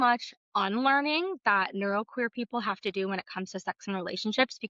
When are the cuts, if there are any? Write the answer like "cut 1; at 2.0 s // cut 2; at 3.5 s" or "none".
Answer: none